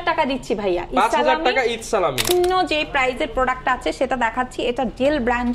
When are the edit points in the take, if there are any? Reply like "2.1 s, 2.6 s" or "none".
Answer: 2.3 s

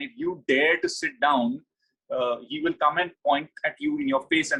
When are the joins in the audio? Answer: none

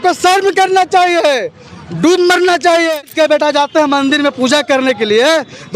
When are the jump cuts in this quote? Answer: 3.1 s

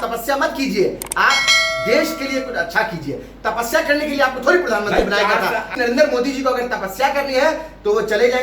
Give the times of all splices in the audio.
5.7 s

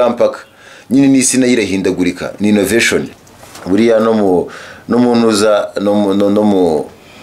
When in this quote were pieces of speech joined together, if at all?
3.1 s

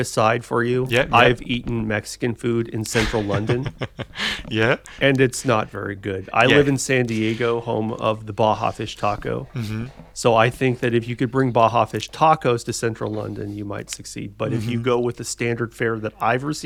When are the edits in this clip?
none

